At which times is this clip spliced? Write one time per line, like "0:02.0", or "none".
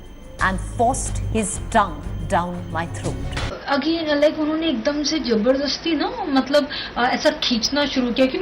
0:03.5

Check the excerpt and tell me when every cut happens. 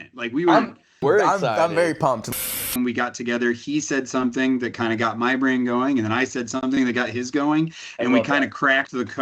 0:02.3

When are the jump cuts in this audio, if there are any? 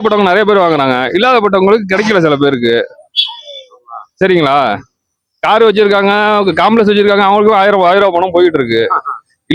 none

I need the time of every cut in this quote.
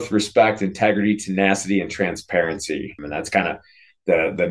0:03.0

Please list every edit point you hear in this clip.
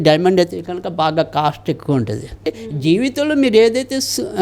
0:02.5

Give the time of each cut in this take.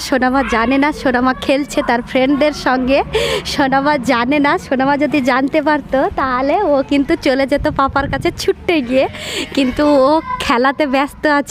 none

